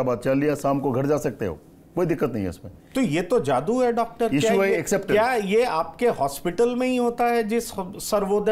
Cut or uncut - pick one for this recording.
uncut